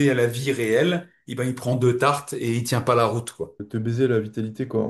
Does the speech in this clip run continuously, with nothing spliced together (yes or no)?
no